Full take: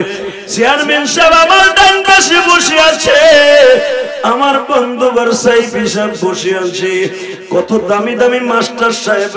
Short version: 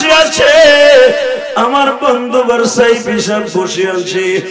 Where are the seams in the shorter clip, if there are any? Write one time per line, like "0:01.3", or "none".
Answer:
none